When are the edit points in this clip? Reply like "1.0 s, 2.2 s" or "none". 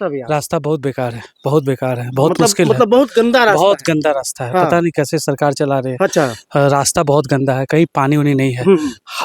none